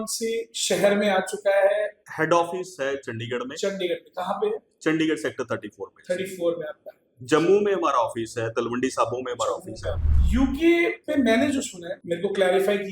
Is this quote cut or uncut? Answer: cut